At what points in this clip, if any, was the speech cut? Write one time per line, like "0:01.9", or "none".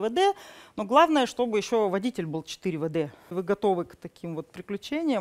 0:03.3